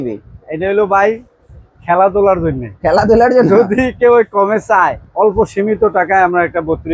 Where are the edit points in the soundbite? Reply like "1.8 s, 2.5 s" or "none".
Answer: 5.0 s